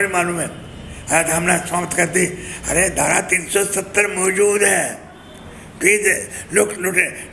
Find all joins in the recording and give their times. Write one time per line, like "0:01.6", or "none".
none